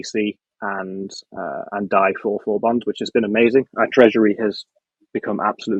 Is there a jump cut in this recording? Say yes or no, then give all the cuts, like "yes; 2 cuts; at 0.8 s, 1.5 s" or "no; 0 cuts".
no; 0 cuts